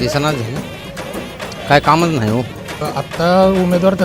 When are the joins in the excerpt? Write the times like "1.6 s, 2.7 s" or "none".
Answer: 2.8 s

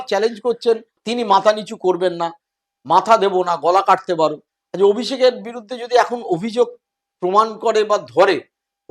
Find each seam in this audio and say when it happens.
1.0 s

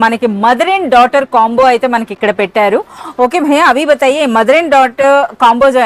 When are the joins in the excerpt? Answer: none

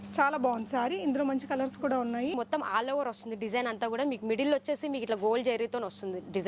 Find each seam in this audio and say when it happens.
2.3 s

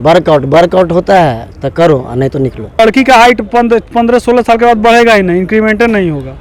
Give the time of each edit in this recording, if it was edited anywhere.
2.8 s

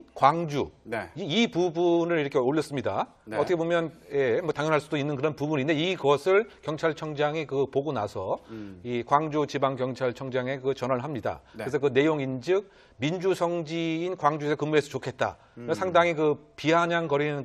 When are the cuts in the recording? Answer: none

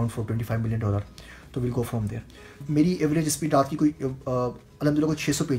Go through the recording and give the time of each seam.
2.6 s

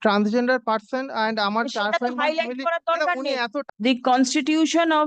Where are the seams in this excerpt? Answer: 3.6 s

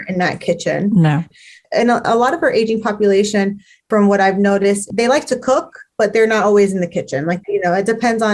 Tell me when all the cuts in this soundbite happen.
1.3 s, 7.4 s

